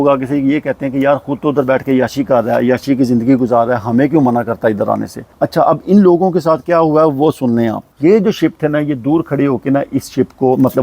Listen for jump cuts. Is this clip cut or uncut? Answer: cut